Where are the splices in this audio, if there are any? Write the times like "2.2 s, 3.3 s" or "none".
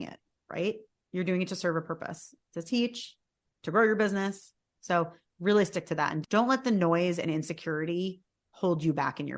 6.2 s